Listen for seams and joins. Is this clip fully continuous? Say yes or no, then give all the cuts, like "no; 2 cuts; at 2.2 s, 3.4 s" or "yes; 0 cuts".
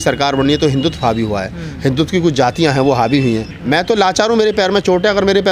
no; 1 cut; at 3.5 s